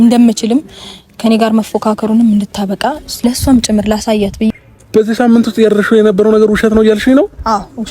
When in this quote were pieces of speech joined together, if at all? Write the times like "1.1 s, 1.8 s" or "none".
4.5 s